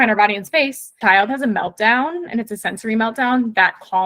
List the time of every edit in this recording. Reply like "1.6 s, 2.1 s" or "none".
1.0 s